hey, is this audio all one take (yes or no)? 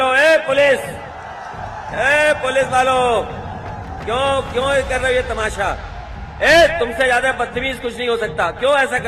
yes